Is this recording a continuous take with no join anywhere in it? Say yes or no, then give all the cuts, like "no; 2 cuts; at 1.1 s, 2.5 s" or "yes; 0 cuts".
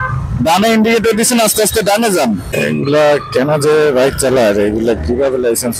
no; 1 cut; at 2.5 s